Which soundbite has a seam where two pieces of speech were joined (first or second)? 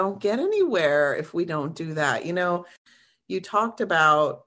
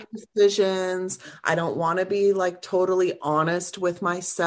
first